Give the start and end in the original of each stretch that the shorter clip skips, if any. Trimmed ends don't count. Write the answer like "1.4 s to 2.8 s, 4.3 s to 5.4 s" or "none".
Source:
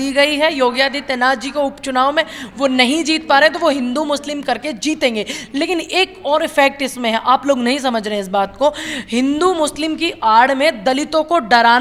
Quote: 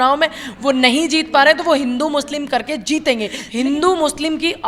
5.4 s to 9.0 s